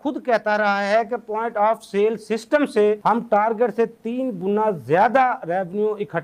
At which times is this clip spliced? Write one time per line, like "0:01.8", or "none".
none

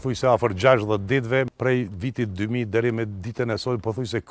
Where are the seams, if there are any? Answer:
0:01.5

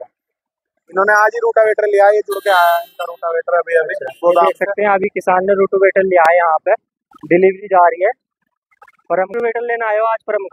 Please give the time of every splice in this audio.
0:09.3

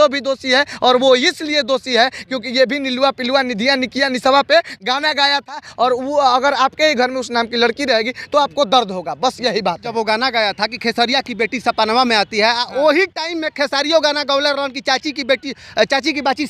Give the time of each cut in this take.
0:09.9

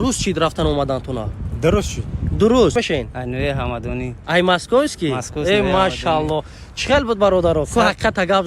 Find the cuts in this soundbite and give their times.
0:02.7

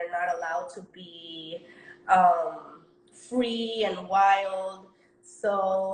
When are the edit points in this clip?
none

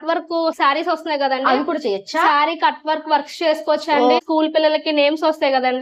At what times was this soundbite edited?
0:04.2

